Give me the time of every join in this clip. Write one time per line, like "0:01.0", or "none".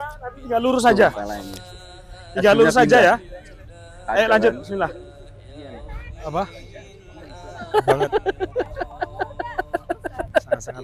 0:05.7